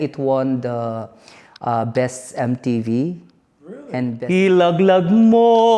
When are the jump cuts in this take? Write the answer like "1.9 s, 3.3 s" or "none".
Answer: 4.1 s